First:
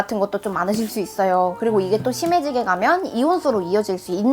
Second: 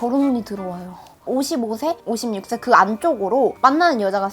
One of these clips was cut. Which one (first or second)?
second